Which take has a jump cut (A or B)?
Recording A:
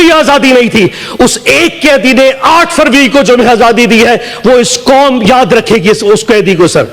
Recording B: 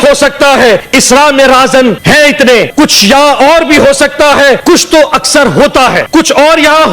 B